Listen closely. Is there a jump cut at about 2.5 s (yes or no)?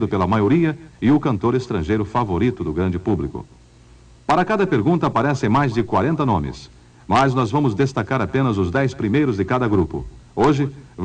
yes